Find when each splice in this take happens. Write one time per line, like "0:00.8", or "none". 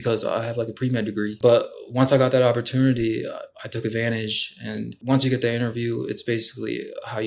0:01.3
0:04.9